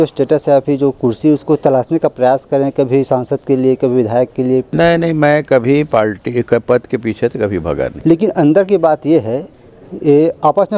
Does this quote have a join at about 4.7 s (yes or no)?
yes